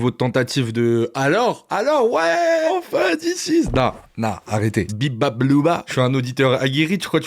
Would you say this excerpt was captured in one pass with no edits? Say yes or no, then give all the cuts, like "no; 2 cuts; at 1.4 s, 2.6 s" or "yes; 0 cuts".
no; 3 cuts; at 2.7 s, 4.9 s, 5.9 s